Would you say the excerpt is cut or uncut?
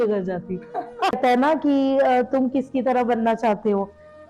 cut